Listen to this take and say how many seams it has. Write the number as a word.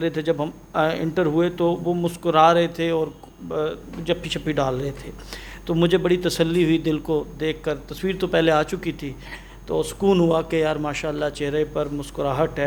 zero